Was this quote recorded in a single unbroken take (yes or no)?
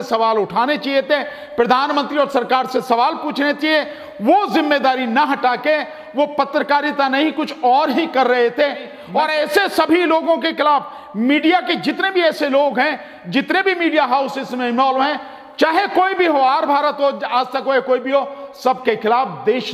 no